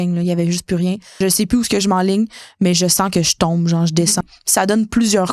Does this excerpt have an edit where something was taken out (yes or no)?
yes